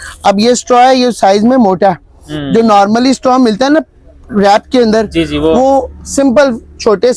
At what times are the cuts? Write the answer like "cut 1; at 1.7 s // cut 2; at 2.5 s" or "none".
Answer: none